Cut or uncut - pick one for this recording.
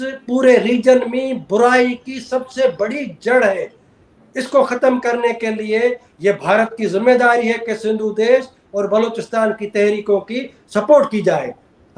uncut